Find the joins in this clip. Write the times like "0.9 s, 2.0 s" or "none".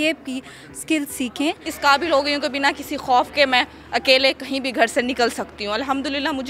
1.7 s